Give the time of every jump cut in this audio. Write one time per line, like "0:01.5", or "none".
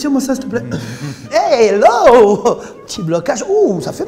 0:01.2